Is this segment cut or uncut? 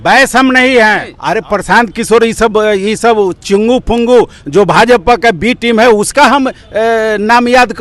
cut